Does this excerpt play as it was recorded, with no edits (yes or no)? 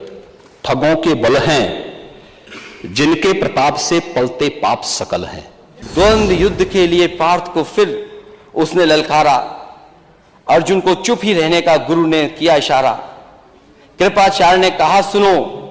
no